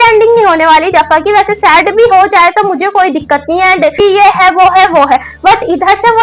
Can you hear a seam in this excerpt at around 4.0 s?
yes; 1 cut; at 4.0 s

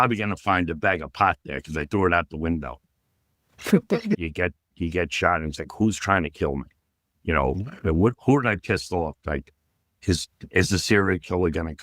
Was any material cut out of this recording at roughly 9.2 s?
yes; 2 cuts; at 4.1 s, 9.2 s

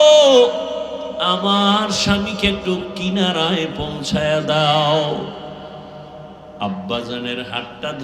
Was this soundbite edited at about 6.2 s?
no; 0 cuts

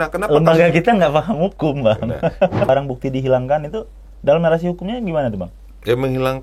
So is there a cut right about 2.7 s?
yes; 1 cut; at 2.7 s

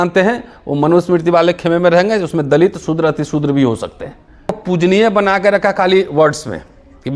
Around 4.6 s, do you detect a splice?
yes; 1 cut; at 4.6 s

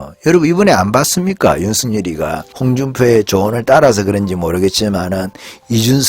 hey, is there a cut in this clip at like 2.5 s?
yes; 1 cut; at 2.5 s

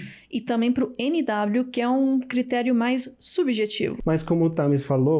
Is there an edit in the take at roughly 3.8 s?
yes; 1 cut; at 3.8 s

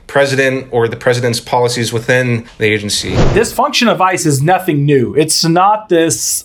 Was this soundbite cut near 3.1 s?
yes; 1 cut; at 3.1 s

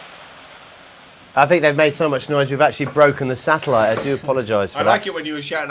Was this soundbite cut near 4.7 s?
yes; 1 cut; at 4.7 s

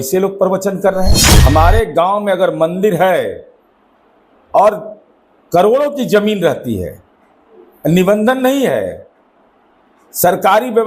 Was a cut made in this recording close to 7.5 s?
no; 1 cut; at 1.3 s

